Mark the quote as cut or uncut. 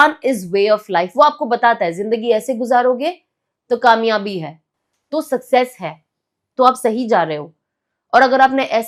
uncut